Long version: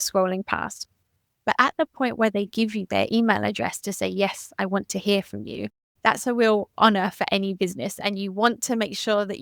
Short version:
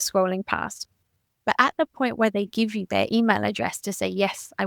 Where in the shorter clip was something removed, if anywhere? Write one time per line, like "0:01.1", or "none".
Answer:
none